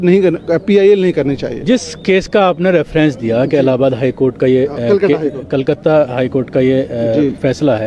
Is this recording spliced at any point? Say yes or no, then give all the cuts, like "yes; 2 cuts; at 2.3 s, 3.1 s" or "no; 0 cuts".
no; 0 cuts